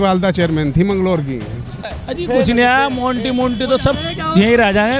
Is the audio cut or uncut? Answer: cut